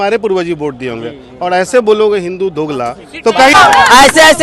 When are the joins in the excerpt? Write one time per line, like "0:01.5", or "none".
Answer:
0:03.5

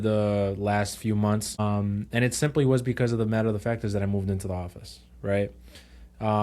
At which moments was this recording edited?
0:01.6

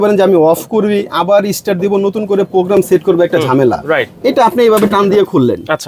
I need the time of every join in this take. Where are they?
none

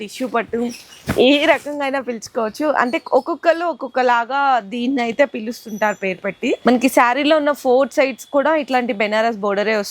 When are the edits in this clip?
0:06.6

